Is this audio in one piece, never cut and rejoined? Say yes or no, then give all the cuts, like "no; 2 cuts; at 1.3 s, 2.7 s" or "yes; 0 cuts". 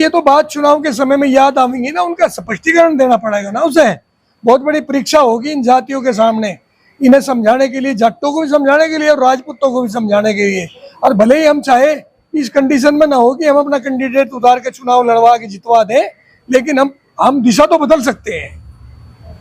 yes; 0 cuts